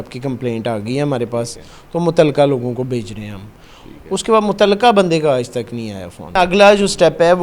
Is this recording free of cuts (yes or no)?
no